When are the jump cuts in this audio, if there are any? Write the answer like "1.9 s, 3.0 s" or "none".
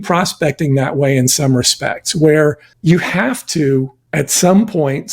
2.7 s, 4.0 s